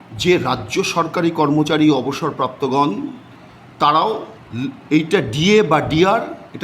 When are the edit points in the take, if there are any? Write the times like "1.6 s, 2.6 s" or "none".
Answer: 4.4 s